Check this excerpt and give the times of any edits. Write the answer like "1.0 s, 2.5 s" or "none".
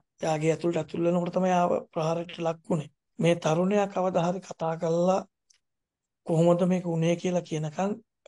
3.0 s